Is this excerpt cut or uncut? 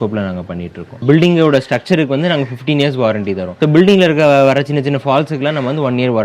cut